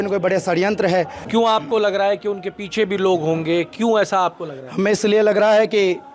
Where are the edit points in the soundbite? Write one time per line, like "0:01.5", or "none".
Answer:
0:01.2

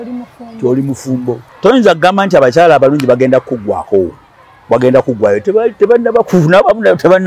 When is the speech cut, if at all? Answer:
0:01.5

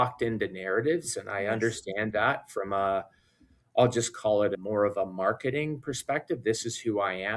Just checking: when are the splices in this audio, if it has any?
0:04.5

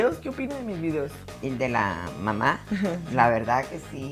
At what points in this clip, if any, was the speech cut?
0:01.2

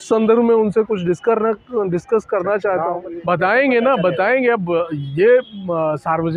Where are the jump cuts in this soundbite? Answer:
0:03.1

